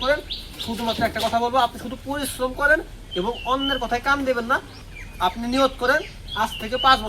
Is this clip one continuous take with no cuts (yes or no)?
no